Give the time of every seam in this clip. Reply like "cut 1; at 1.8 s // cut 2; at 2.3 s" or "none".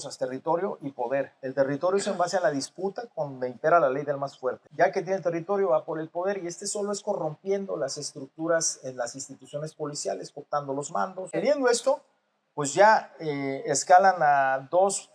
cut 1; at 4.6 s // cut 2; at 11.2 s